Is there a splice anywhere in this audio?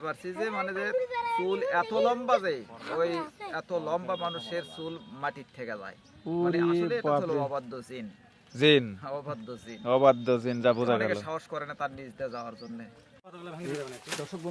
yes; 1 cut; at 13.0 s

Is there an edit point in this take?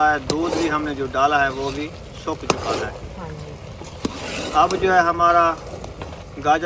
no; 0 cuts

